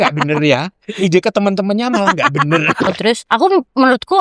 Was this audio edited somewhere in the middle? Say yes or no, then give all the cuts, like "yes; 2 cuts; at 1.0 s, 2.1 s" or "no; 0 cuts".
yes; 1 cut; at 2.9 s